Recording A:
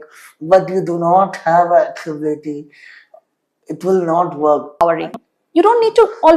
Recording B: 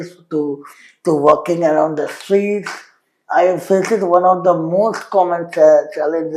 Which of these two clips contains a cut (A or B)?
A